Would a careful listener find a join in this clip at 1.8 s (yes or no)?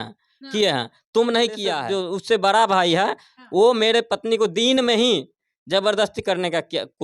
yes